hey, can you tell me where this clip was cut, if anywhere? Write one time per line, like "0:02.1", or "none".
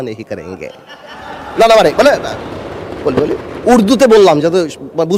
none

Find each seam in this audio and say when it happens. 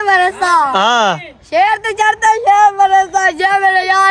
none

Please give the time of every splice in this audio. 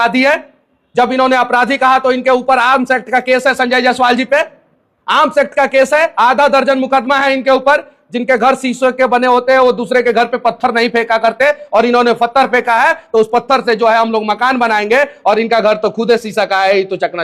none

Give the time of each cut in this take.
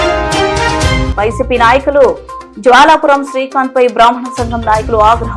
0:01.0

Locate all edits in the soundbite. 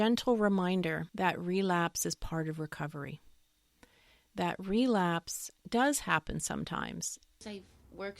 0:01.1
0:07.4

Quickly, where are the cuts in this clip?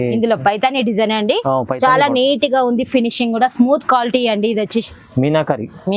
0:04.9

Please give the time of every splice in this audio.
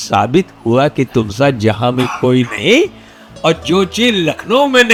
none

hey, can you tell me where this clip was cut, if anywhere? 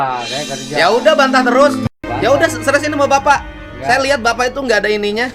0:02.1

